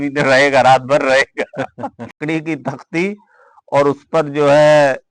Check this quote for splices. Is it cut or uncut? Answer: cut